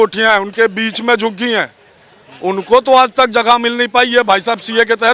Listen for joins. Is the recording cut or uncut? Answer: uncut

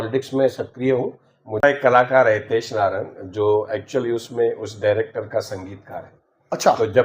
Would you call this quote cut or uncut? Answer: cut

